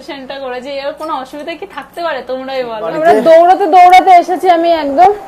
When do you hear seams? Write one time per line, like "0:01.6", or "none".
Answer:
0:02.8